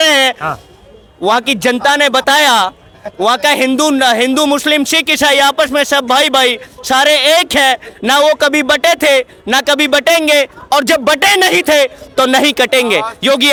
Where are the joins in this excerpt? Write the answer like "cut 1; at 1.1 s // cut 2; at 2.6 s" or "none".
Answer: none